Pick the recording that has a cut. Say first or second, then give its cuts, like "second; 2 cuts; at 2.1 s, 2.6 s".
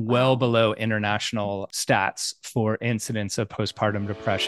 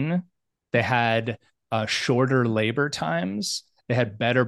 first; 1 cut; at 1.7 s